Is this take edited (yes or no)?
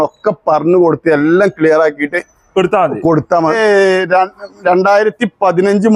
yes